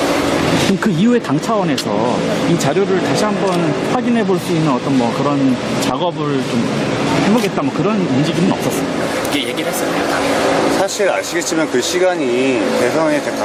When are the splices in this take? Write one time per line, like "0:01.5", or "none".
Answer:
none